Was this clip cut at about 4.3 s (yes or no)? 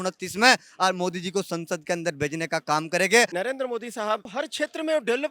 yes